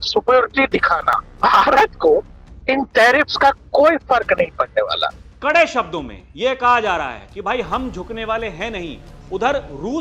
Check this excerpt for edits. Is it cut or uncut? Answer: cut